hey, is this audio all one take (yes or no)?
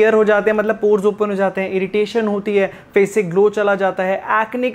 yes